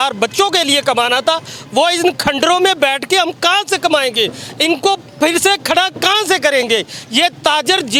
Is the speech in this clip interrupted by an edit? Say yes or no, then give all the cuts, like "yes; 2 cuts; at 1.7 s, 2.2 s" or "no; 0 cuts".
no; 0 cuts